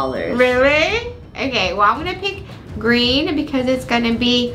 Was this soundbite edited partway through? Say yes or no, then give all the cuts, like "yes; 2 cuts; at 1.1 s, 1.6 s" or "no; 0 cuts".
no; 0 cuts